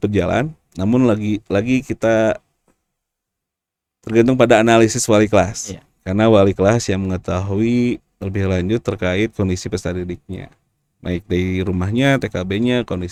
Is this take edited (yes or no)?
no